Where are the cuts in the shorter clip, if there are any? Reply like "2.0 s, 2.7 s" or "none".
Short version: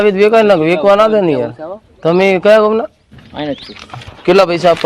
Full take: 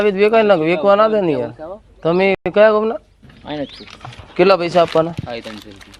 2.4 s